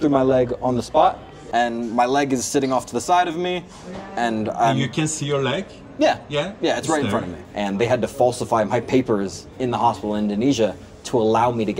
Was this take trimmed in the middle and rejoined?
yes; 2 cuts; at 1.3 s, 7.4 s

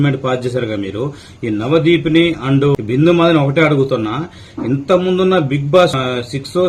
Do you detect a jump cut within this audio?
yes; 2 cuts; at 2.7 s, 5.9 s

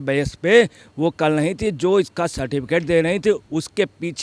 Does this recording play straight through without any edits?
yes; 0 cuts

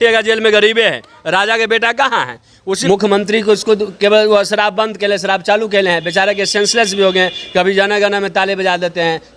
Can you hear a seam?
yes; 1 cut; at 2.8 s

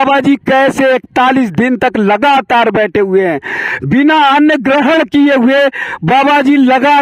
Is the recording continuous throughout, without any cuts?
yes; 0 cuts

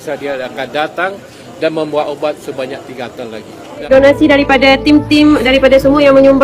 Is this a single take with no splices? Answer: no; 1 cut; at 3.9 s

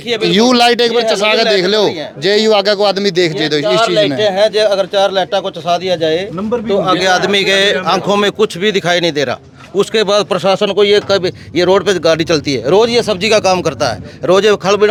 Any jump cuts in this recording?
no; 0 cuts

